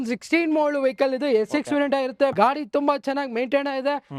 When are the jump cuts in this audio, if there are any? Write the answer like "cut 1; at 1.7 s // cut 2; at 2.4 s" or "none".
cut 1; at 2.3 s